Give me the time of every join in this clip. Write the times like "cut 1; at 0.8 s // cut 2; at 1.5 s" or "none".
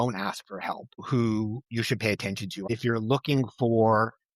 cut 1; at 1.0 s // cut 2; at 2.7 s